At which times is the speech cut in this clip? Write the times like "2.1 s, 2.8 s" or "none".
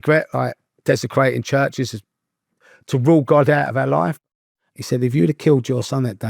4.2 s